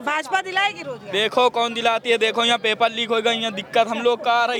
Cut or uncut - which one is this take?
uncut